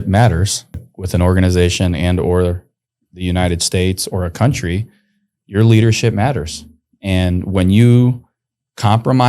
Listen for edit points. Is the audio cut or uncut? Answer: cut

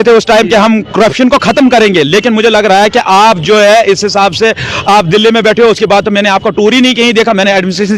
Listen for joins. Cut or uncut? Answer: uncut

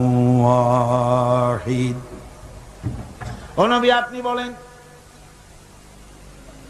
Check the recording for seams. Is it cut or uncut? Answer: uncut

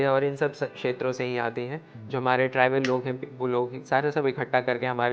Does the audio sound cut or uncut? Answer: uncut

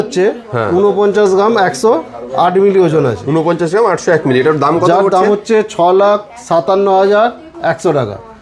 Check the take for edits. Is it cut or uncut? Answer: uncut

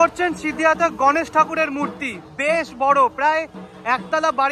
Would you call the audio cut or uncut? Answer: uncut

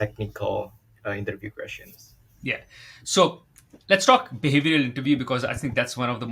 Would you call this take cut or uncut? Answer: uncut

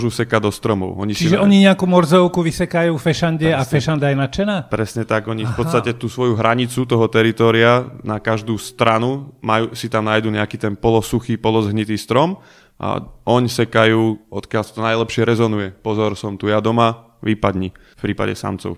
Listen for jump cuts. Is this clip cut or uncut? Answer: cut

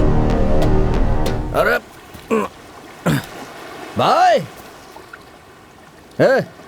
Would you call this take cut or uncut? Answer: cut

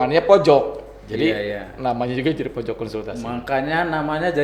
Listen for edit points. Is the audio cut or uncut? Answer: uncut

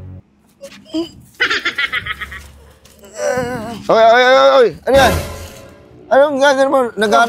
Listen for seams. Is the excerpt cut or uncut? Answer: uncut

